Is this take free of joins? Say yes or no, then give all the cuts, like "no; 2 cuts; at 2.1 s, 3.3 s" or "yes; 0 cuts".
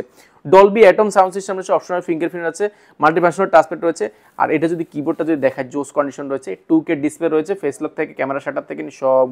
yes; 0 cuts